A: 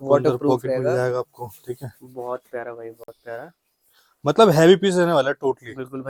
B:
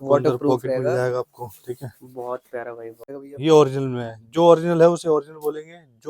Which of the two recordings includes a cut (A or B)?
B